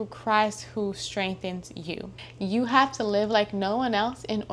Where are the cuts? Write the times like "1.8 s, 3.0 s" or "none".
2.1 s